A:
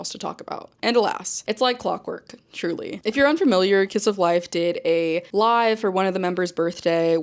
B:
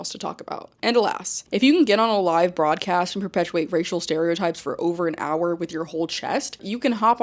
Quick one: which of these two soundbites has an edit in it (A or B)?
B